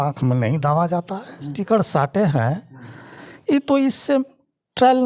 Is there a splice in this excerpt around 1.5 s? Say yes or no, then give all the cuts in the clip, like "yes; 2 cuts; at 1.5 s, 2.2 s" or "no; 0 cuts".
yes; 1 cut; at 1.5 s